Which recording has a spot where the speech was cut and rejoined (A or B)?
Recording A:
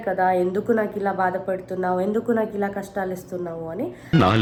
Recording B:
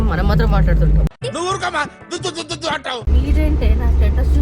B